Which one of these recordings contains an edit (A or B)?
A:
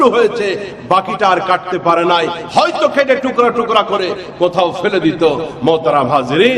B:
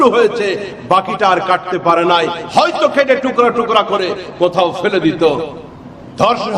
B